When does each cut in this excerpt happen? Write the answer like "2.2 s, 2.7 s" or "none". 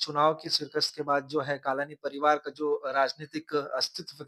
none